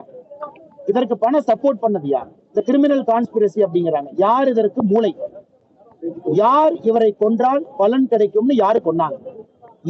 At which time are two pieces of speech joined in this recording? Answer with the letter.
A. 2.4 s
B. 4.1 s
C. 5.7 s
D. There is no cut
D